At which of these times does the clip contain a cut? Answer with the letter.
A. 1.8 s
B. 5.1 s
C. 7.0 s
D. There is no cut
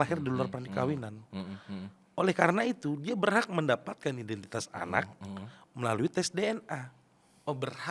D